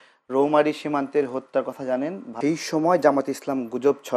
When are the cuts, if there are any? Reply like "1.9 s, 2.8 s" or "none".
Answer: 2.2 s